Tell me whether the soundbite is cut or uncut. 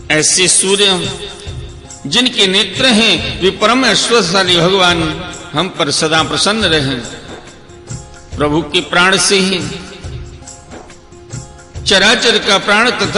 uncut